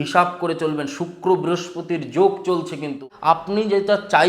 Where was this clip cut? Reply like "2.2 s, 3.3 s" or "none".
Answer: 3.4 s

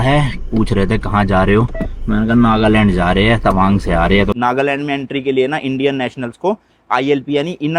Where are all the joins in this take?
4.3 s

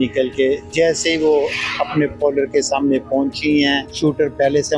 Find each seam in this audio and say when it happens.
3.9 s

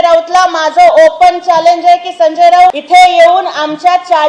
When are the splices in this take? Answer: 2.7 s

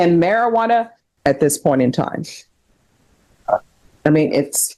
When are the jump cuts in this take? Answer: 1.0 s

